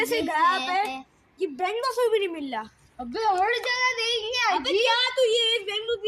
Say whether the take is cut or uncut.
uncut